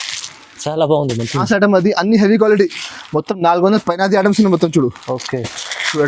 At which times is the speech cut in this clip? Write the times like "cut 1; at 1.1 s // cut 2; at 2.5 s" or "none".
cut 1; at 1.4 s